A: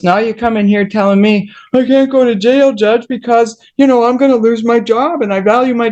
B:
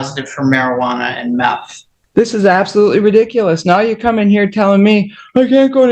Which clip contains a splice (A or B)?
B